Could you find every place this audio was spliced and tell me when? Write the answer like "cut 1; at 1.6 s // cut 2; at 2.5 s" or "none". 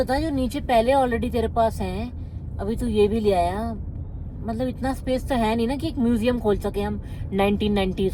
none

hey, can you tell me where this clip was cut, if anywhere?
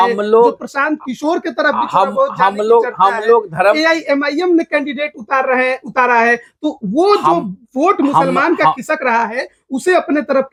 none

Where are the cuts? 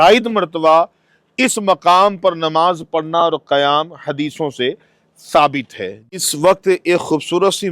cut 1; at 6.1 s

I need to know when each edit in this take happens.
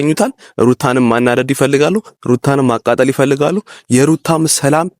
none

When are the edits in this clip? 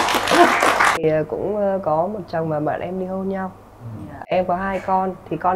cut 1; at 1.0 s

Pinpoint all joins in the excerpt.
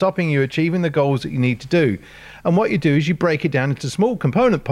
none

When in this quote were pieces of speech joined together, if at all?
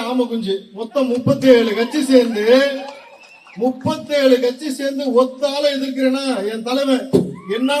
none

